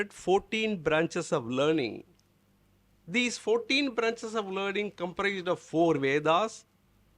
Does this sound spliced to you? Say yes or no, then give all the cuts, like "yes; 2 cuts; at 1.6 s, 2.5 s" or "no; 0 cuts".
no; 0 cuts